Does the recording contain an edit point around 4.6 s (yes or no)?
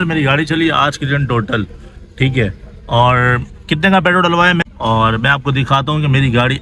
yes